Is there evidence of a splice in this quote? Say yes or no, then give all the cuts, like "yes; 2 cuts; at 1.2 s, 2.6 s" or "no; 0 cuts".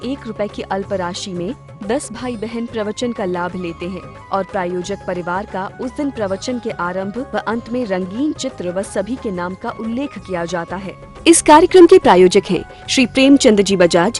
yes; 1 cut; at 10.9 s